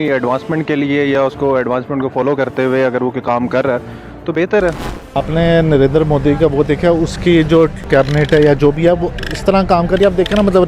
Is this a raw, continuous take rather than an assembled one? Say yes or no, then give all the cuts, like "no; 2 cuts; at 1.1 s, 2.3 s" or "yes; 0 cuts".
no; 2 cuts; at 5.0 s, 7.9 s